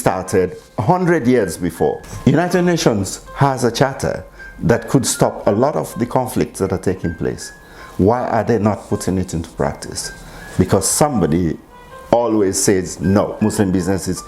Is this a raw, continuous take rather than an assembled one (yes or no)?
no